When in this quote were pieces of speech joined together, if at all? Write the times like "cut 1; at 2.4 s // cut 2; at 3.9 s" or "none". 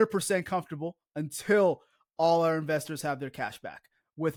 none